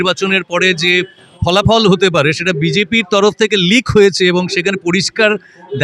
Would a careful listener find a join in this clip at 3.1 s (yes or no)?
no